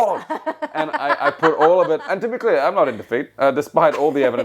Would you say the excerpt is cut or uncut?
uncut